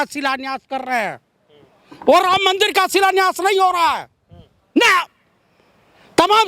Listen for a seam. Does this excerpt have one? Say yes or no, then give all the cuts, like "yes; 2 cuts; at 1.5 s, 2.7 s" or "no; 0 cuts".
no; 0 cuts